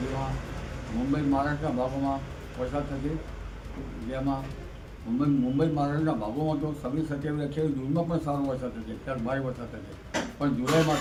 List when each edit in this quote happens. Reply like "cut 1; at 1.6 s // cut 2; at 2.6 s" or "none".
none